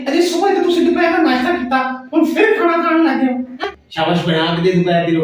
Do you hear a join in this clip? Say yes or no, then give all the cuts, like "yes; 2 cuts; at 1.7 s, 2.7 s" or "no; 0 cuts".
yes; 1 cut; at 3.5 s